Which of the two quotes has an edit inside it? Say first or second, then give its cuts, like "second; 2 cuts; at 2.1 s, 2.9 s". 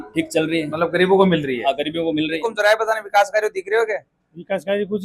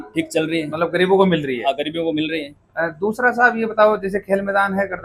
first; 1 cut; at 2.4 s